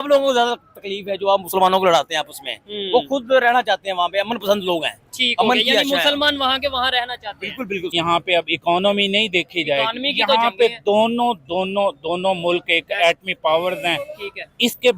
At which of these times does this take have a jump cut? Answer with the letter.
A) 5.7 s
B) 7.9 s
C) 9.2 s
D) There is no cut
B